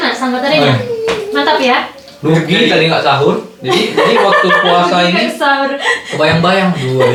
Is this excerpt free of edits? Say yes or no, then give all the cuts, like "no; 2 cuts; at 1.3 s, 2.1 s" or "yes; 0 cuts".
yes; 0 cuts